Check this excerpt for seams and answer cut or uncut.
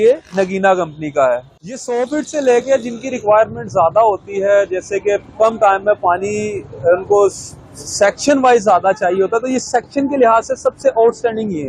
cut